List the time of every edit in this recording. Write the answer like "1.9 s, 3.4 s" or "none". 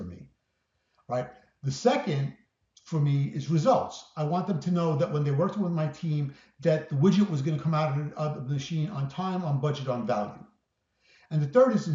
none